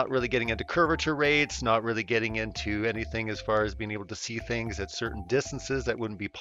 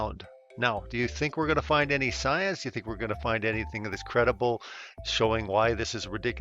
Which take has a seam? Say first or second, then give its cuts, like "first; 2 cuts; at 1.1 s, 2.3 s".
second; 1 cut; at 4.0 s